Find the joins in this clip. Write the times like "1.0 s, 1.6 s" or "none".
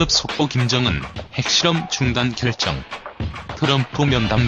none

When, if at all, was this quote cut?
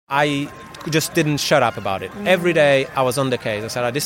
none

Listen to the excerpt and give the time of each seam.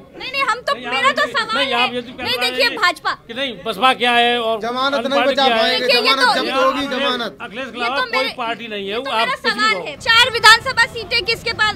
10.0 s

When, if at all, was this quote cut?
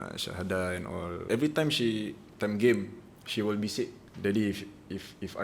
1.2 s, 4.0 s

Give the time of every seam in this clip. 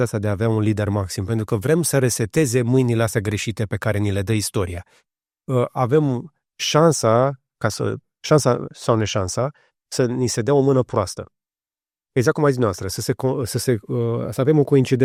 none

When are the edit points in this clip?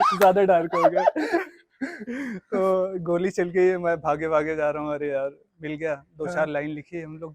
none

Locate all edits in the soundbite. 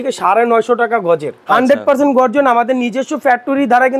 1.3 s

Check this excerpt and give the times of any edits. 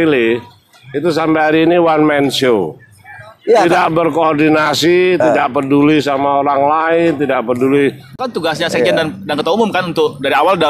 8.2 s

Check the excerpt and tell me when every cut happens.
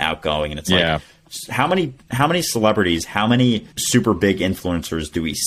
3.7 s

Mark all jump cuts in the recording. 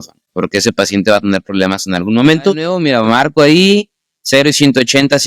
2.7 s

